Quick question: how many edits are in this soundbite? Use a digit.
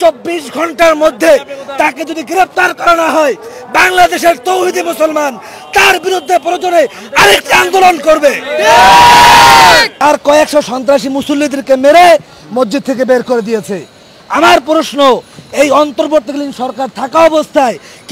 1